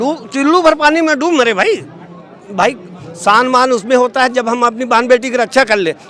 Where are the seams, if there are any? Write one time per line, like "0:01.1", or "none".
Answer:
none